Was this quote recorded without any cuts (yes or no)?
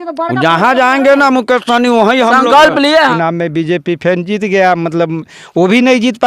no